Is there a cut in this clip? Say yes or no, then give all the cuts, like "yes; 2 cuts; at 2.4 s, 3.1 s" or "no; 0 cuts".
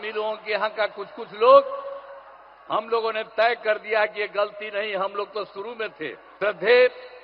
yes; 1 cut; at 6.2 s